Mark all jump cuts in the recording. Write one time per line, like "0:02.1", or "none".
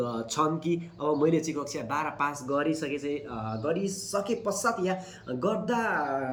none